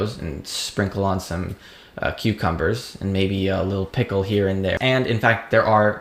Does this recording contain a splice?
yes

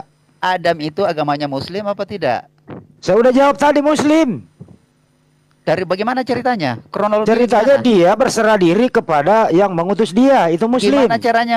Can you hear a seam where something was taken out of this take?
no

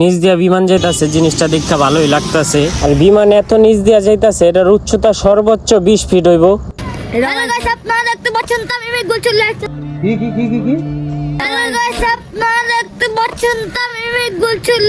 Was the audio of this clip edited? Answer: yes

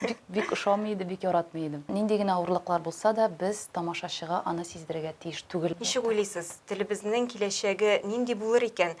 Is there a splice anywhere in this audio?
yes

